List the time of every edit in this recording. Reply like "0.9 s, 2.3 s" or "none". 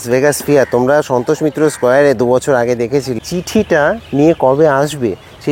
3.5 s